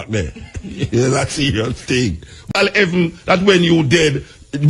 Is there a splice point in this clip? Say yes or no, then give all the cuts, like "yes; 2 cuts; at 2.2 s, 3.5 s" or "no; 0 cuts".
yes; 1 cut; at 2.5 s